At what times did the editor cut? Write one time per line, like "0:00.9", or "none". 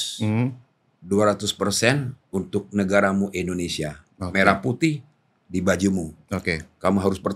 none